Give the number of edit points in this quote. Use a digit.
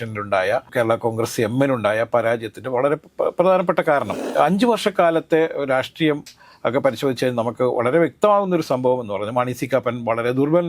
1